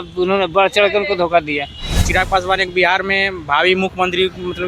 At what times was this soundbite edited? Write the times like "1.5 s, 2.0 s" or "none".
2.0 s